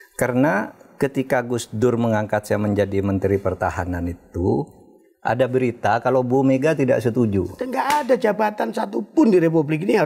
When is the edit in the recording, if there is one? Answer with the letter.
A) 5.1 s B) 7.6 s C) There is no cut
B